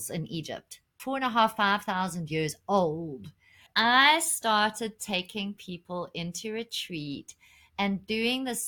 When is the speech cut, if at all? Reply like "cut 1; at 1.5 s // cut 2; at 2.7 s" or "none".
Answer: cut 1; at 1.0 s // cut 2; at 3.7 s

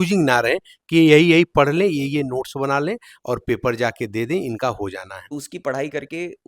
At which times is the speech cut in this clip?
cut 1; at 5.1 s

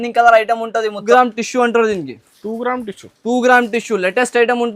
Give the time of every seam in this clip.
cut 1; at 1.0 s

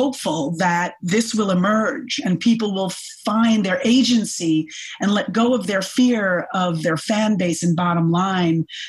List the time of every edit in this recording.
cut 1; at 1.0 s

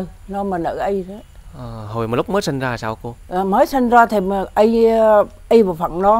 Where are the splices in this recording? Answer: none

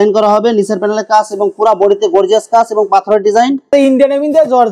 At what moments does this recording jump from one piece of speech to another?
cut 1; at 3.7 s

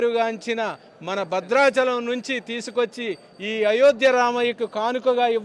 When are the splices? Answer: none

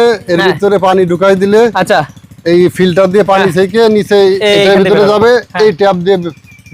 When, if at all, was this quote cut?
none

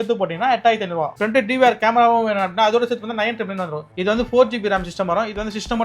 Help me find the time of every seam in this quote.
cut 1; at 1.1 s // cut 2; at 3.9 s

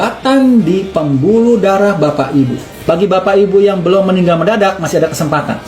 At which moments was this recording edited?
cut 1; at 2.8 s

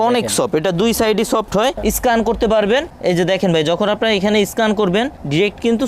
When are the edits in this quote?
cut 1; at 1.8 s // cut 2; at 2.9 s

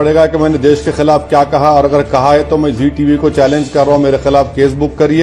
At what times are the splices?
none

